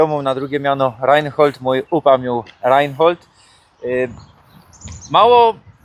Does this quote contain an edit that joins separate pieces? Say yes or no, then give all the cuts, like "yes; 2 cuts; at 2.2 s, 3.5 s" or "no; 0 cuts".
no; 0 cuts